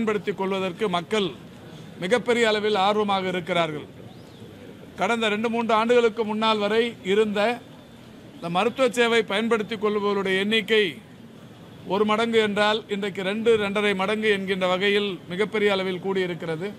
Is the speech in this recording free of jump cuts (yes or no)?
yes